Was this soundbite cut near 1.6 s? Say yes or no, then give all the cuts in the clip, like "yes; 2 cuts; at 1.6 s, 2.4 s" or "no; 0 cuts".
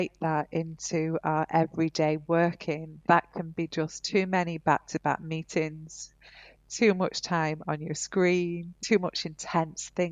no; 2 cuts; at 2.9 s, 8.7 s